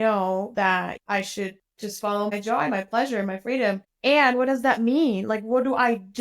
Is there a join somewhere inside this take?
yes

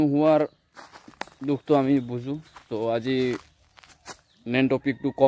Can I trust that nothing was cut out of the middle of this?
yes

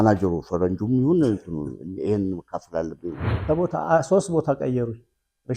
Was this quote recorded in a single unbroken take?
no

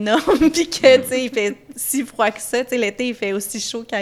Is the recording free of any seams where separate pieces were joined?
yes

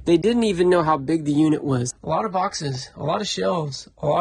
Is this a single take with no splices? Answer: no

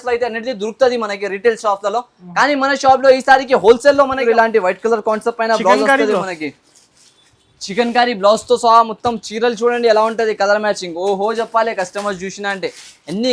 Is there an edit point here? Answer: yes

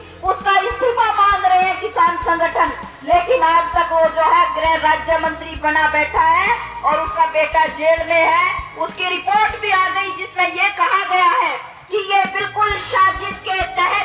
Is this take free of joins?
yes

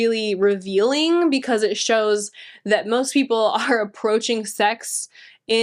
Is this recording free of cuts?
yes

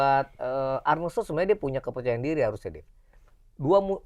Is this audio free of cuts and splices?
yes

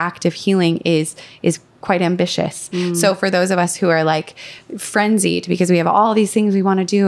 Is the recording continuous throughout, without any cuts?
yes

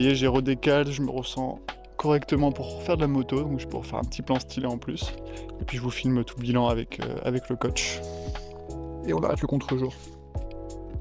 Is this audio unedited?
no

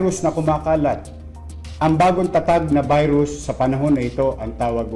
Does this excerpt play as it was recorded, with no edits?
yes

